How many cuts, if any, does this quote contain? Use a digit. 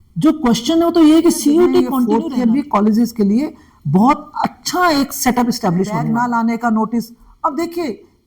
2